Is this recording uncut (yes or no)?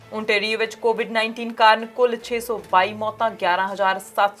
yes